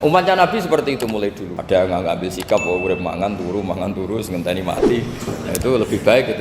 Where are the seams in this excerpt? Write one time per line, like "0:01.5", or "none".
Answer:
0:01.5